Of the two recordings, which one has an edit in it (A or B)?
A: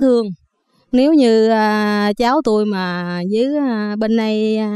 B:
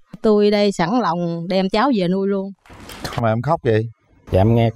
B